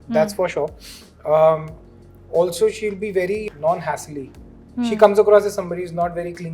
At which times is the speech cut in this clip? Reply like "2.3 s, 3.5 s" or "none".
none